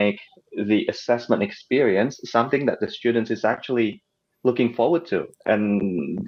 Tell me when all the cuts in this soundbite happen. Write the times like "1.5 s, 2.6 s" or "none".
none